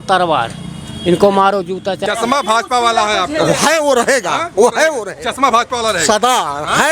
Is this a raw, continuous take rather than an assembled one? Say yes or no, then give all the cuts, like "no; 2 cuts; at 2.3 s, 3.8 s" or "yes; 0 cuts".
no; 1 cut; at 2.0 s